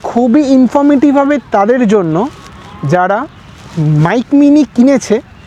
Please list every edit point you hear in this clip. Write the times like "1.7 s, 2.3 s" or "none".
none